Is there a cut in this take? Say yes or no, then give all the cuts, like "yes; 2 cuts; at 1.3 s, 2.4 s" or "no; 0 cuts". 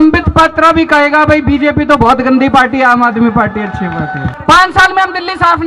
yes; 1 cut; at 4.3 s